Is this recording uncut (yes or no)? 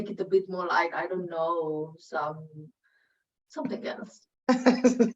no